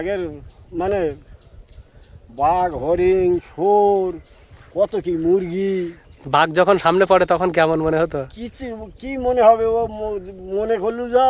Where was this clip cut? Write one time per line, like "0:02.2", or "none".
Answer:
none